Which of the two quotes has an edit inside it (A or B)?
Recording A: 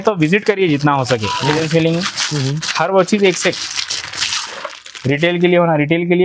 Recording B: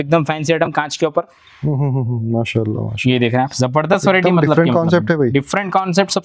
A